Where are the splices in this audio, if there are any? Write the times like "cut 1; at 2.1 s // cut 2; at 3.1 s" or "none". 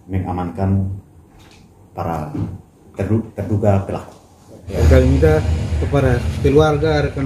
cut 1; at 4.7 s